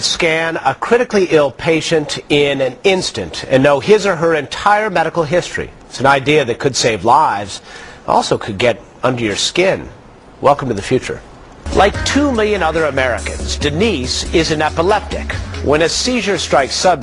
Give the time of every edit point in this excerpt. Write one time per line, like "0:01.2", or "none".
none